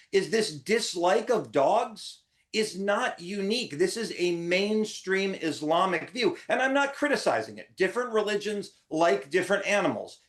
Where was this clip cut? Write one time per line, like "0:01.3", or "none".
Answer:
none